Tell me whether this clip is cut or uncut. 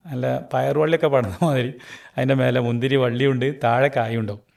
uncut